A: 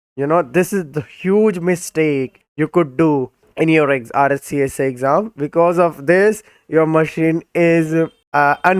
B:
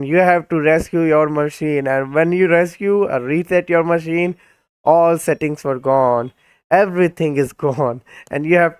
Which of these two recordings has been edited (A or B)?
A